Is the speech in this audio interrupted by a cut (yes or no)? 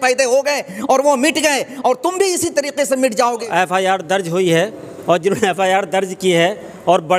yes